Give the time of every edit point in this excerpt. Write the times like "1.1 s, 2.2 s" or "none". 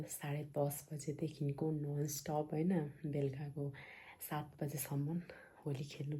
none